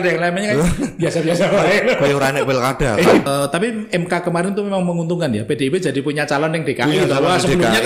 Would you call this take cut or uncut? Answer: cut